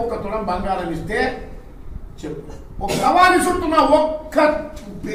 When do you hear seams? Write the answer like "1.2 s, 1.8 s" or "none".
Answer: 3.0 s